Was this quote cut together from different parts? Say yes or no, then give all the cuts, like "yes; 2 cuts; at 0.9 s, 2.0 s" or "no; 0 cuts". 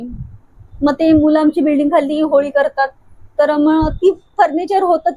no; 0 cuts